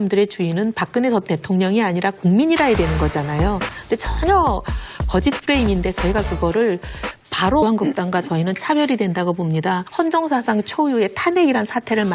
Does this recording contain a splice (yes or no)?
no